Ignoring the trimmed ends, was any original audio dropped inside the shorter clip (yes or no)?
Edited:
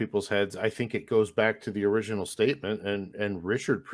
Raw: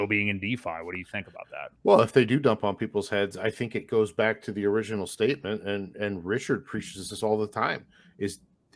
no